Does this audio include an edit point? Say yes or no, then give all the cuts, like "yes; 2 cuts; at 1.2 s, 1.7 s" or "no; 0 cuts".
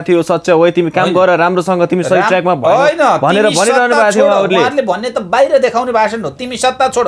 no; 0 cuts